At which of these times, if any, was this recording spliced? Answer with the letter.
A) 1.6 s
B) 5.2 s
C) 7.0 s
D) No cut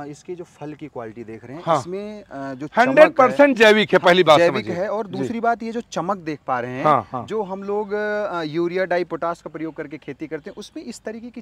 D